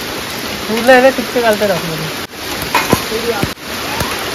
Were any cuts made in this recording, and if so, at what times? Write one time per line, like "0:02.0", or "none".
0:02.3
0:03.5